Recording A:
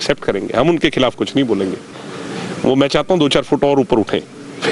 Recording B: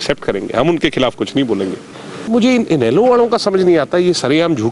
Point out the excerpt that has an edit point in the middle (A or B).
B